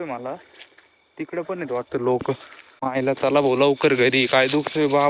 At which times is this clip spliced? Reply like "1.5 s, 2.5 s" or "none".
2.9 s